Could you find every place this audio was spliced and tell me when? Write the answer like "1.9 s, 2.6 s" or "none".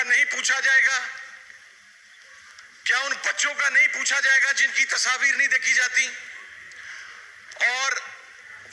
none